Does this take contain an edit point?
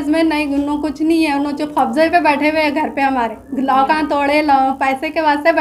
no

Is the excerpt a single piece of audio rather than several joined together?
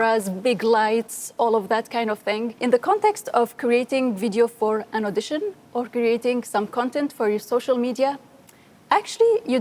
no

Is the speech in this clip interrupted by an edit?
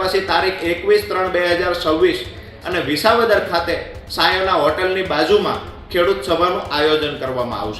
yes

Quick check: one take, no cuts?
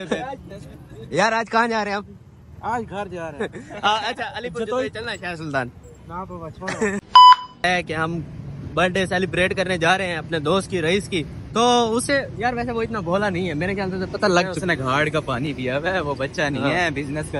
yes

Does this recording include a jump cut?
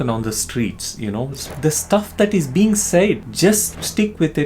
yes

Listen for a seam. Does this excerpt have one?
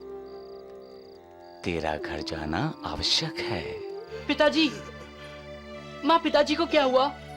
yes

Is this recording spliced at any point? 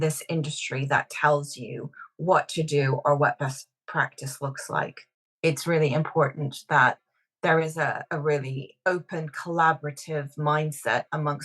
yes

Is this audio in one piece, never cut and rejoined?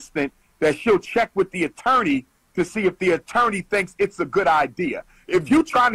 yes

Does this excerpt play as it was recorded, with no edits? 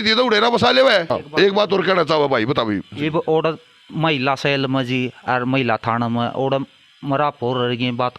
no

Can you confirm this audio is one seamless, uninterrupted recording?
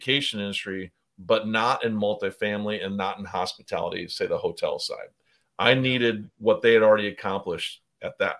yes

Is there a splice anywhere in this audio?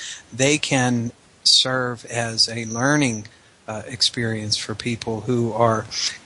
no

